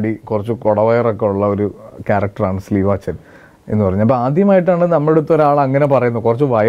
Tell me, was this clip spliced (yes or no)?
no